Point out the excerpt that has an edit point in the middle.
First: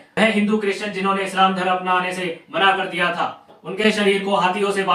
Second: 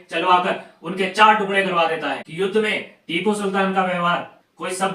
second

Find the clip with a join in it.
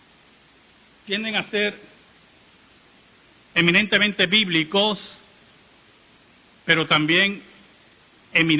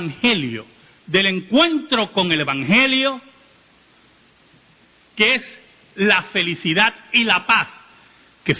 first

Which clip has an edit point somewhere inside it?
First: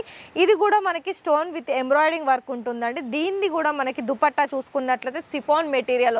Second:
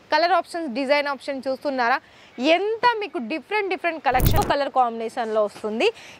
second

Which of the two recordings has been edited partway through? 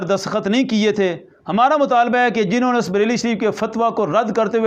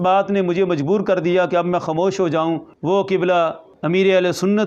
second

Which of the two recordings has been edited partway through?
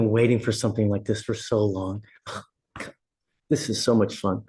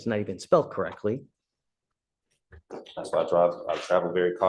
second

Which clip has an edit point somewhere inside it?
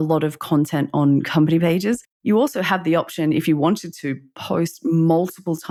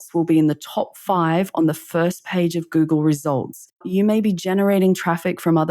second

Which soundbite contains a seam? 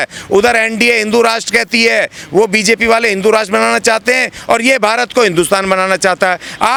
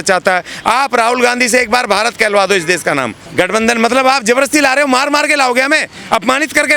second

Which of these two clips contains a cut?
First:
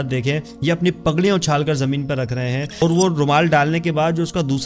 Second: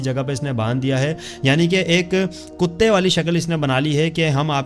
first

